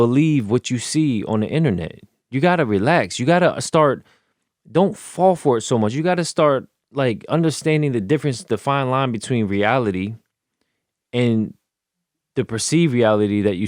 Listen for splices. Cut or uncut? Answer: uncut